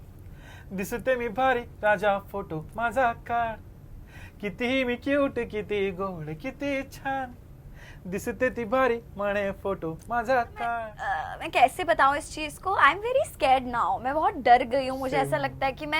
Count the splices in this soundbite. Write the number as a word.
one